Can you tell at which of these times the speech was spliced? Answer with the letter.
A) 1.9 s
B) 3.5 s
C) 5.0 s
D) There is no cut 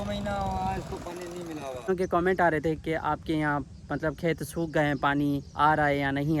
A